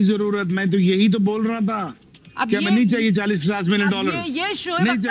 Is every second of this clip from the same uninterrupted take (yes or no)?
yes